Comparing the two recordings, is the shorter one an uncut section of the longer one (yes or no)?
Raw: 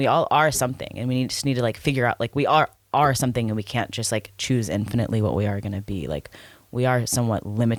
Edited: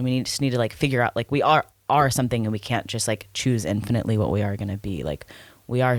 yes